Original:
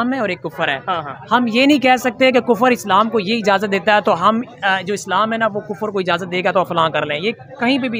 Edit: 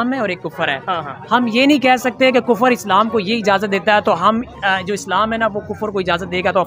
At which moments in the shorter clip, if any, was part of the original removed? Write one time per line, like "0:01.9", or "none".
none